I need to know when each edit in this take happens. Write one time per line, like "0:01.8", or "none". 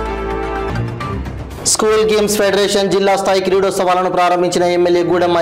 0:01.1